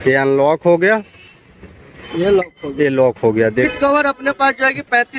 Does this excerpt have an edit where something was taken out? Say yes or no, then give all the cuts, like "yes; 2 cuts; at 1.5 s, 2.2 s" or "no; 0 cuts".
yes; 1 cut; at 3.7 s